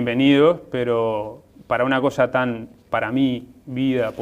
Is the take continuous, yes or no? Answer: no